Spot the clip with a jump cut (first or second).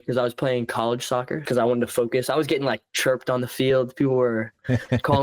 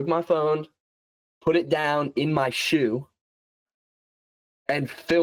first